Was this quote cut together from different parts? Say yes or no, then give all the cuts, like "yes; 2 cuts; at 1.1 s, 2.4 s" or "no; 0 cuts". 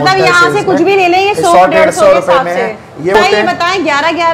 yes; 1 cut; at 3.1 s